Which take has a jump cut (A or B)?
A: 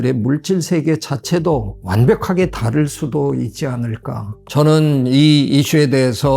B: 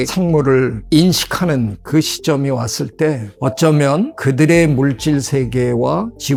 A